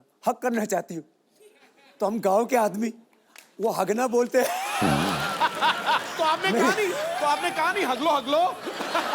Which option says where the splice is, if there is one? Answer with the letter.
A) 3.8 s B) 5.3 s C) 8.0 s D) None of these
B